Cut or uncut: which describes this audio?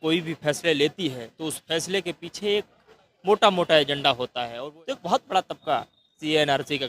cut